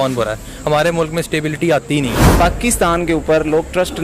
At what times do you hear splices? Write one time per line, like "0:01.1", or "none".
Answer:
0:02.3